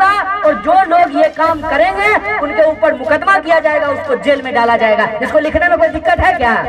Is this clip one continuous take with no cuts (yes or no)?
yes